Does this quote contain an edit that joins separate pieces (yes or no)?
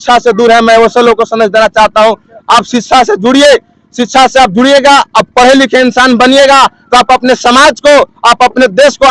no